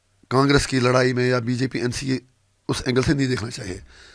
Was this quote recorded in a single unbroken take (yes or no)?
yes